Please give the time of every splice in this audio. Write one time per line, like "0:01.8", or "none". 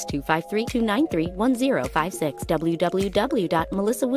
none